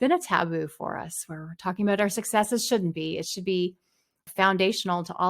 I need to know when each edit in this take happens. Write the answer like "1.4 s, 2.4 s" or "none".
4.3 s